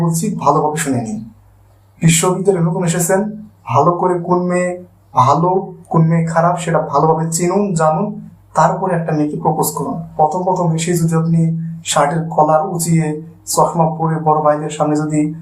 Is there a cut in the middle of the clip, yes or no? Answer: yes